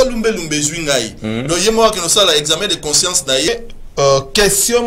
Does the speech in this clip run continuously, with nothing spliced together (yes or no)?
no